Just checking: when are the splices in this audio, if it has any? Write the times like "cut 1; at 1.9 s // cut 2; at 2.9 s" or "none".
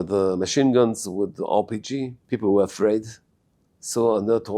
cut 1; at 2.2 s